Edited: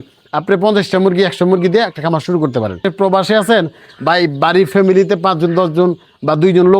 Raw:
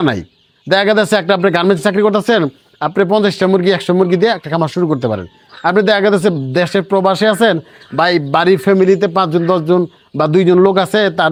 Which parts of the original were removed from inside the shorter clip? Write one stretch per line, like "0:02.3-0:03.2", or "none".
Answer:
0:05.3-0:06.8